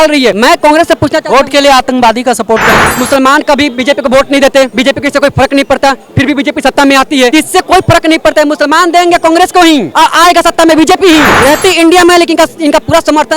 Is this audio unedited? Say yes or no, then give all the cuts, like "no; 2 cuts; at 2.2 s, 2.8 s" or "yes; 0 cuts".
no; 2 cuts; at 3.0 s, 11.3 s